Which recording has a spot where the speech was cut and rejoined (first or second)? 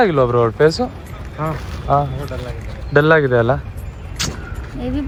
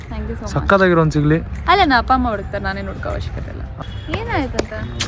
second